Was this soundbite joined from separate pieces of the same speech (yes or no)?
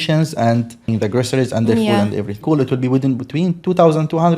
yes